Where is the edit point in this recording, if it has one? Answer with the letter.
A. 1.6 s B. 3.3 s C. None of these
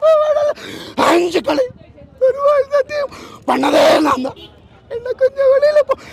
C